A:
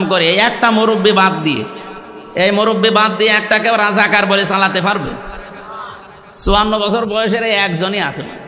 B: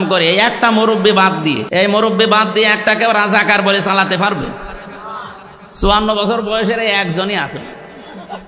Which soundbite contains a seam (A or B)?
B